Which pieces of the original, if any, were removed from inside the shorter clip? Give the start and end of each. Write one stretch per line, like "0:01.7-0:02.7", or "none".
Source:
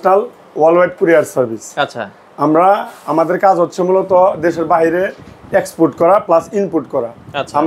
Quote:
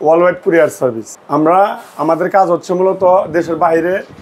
0:01.6-0:02.2